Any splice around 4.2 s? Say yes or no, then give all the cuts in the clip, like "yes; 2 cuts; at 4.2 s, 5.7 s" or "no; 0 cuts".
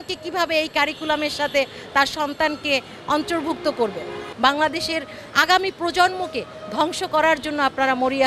yes; 1 cut; at 4.2 s